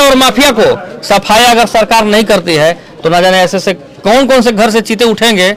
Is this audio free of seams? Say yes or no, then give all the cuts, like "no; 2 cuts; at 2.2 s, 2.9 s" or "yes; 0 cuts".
yes; 0 cuts